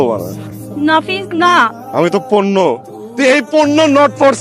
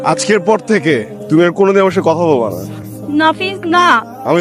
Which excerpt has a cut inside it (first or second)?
second